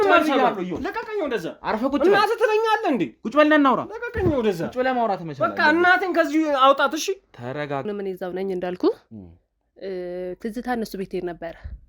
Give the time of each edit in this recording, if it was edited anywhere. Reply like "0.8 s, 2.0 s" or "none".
7.9 s